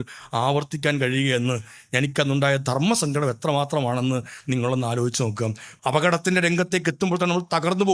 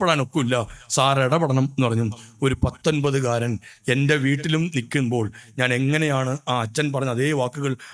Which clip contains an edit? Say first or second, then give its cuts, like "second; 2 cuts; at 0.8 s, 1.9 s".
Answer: first; 1 cut; at 5.7 s